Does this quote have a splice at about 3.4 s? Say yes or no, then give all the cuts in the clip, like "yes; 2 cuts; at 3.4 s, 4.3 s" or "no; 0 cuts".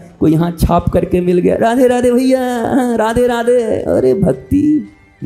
no; 0 cuts